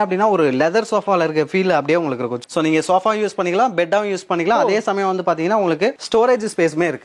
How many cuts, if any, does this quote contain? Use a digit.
1